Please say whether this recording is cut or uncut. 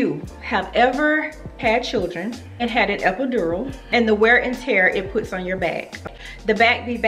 cut